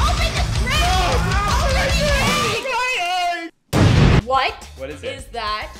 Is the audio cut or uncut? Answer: cut